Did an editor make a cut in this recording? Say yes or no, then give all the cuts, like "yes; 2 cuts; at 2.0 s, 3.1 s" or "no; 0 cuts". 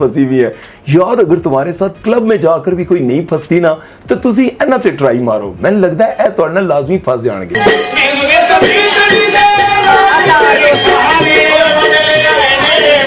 no; 0 cuts